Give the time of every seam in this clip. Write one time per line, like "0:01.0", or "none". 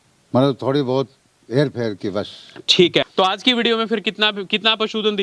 0:03.1

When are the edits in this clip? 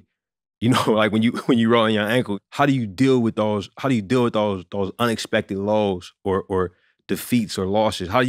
0:02.3

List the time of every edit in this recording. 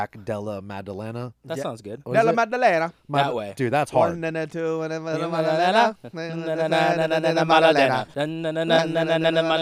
0:08.1

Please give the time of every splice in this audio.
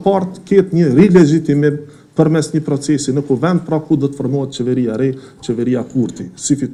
none

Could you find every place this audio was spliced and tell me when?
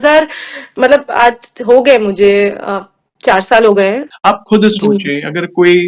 0:04.1

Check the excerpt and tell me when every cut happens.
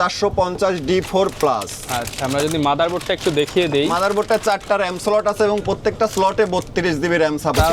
none

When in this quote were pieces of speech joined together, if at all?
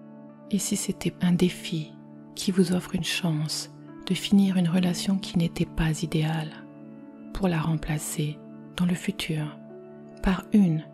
none

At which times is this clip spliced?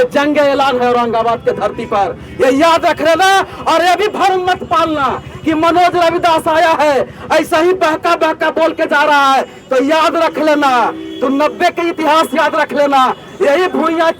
none

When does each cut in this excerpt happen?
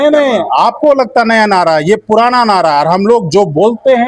none

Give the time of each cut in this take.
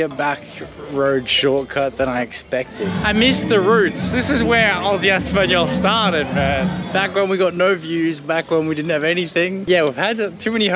0:02.9
0:06.9
0:09.6

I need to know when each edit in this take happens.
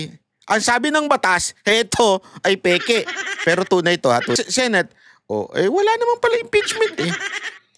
0:04.4

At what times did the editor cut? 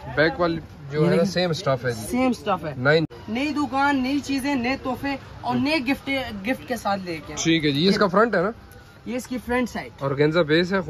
0:03.1

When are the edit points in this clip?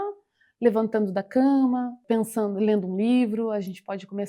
0:02.0

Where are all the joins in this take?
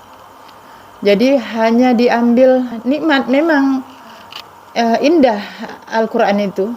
0:02.8

